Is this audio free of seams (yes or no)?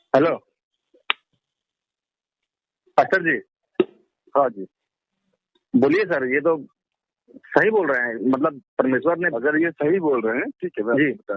yes